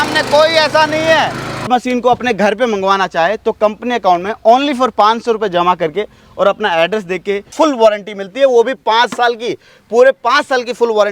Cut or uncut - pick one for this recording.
cut